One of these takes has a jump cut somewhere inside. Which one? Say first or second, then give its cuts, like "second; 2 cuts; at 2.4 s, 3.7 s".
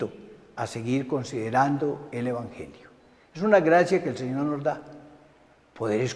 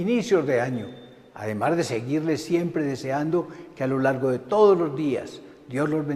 first; 1 cut; at 2.5 s